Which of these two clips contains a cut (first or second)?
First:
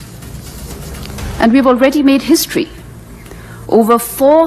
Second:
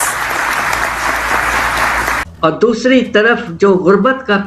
second